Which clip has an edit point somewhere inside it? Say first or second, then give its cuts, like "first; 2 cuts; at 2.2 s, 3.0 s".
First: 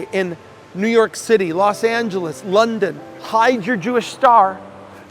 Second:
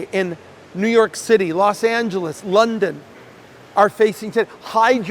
first; 1 cut; at 3.2 s